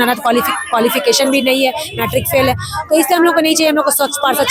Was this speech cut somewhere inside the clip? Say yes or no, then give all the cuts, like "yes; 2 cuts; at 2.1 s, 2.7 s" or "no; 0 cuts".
no; 0 cuts